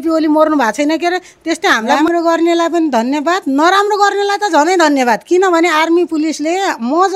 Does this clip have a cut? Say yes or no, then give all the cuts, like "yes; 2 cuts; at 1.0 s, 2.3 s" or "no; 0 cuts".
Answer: yes; 1 cut; at 2.0 s